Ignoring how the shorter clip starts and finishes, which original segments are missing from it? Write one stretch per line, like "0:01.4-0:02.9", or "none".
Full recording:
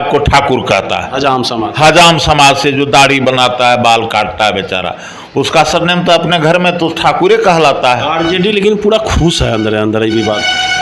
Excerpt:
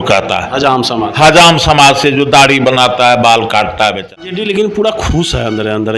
0:04.4-0:07.9